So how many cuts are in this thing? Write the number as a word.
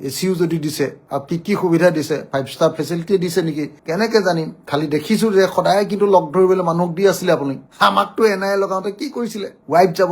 two